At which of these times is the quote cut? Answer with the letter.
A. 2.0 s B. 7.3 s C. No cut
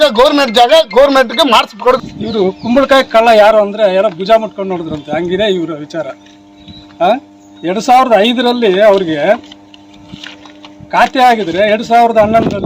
A